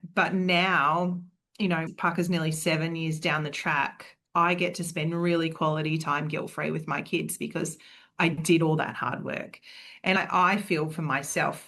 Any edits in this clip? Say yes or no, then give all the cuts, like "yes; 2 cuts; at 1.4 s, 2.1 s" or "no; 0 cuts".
yes; 1 cut; at 10.2 s